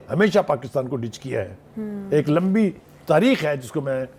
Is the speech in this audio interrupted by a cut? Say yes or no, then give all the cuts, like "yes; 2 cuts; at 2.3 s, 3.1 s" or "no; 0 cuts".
no; 0 cuts